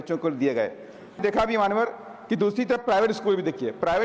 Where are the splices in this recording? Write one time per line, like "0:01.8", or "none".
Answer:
0:01.2